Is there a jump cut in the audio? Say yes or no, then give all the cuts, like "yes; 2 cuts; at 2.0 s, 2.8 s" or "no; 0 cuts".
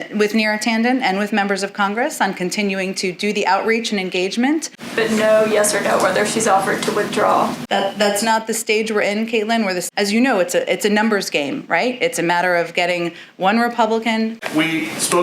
yes; 3 cuts; at 4.8 s, 9.8 s, 14.4 s